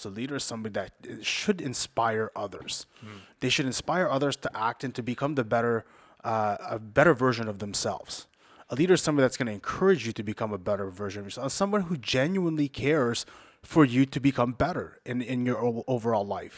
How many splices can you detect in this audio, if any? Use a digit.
1